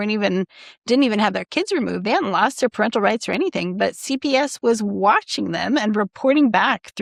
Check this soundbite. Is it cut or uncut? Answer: uncut